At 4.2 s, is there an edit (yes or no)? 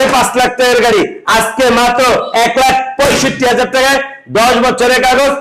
no